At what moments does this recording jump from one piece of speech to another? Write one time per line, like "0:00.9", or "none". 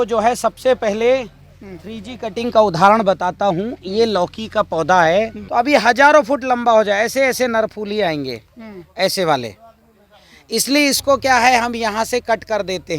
0:05.4